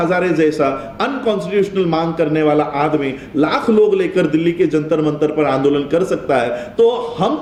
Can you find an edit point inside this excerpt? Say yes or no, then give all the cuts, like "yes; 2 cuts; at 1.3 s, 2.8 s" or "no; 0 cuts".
no; 0 cuts